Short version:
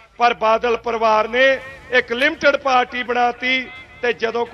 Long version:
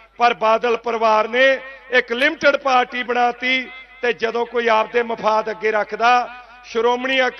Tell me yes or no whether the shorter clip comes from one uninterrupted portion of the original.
yes